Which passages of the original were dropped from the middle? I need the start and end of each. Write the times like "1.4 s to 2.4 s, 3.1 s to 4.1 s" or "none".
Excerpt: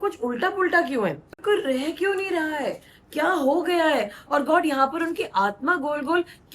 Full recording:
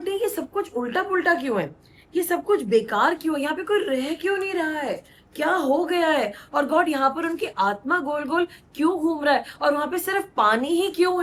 1.9 s to 3.6 s